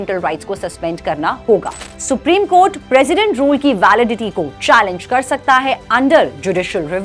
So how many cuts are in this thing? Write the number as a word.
one